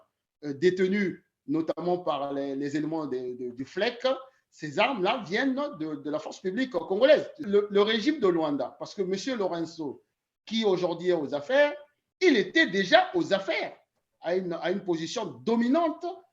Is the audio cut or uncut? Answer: cut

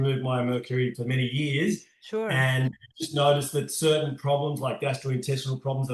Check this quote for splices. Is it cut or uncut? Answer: uncut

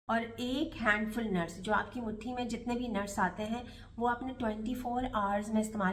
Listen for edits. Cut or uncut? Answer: uncut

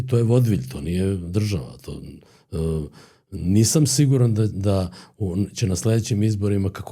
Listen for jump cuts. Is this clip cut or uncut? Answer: uncut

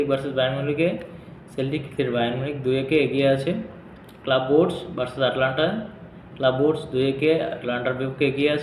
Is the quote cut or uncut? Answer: uncut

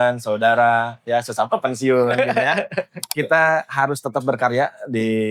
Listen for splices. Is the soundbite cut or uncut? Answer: cut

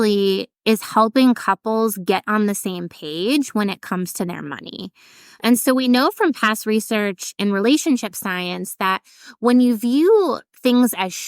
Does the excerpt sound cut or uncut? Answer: cut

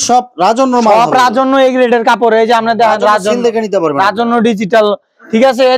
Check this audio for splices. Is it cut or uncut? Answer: uncut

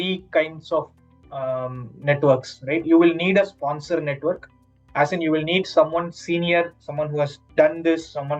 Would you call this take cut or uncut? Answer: uncut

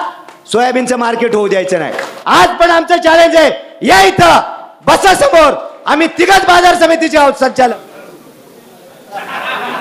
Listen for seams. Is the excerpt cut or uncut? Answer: cut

